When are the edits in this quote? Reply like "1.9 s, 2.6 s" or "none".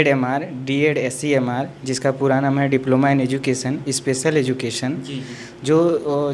none